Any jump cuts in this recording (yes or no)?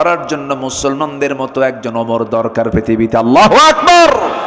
no